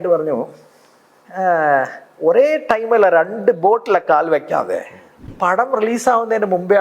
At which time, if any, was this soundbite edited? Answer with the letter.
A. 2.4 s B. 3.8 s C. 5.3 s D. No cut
C